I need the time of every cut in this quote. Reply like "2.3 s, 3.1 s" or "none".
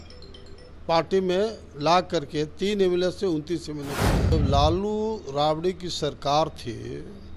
4.3 s